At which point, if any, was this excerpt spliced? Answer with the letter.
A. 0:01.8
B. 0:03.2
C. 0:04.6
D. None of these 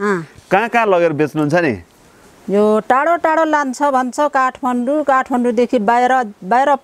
D